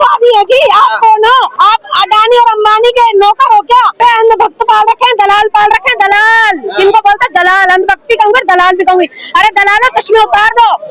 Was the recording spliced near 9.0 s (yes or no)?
no